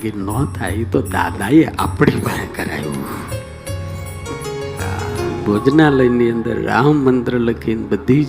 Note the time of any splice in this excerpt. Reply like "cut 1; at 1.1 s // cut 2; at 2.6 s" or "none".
cut 1; at 5.4 s